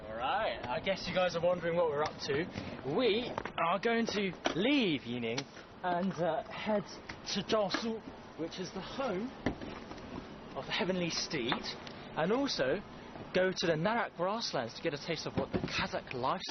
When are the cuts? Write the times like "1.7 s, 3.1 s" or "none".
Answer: none